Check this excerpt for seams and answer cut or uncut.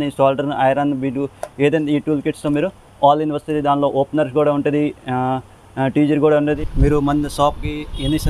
cut